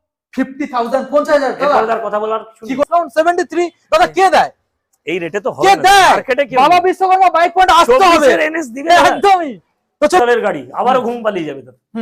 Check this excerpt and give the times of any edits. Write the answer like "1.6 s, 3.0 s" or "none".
2.8 s, 10.2 s